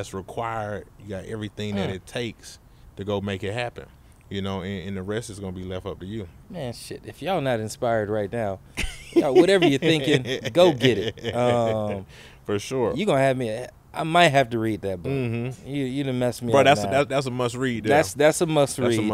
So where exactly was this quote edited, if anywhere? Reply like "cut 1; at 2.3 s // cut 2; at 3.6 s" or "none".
cut 1; at 6.4 s